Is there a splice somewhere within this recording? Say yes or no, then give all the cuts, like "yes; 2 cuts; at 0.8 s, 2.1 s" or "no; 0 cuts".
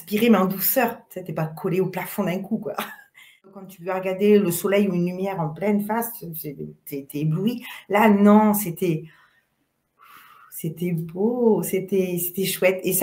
yes; 1 cut; at 3.6 s